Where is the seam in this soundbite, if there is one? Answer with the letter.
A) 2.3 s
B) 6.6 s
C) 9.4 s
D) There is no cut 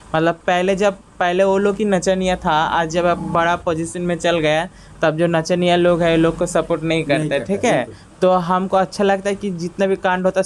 D